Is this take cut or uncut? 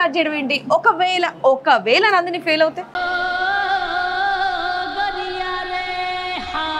uncut